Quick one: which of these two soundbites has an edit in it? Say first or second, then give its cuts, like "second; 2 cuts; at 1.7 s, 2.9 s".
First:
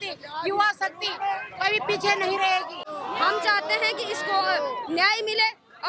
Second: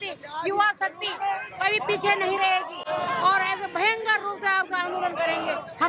first; 1 cut; at 2.8 s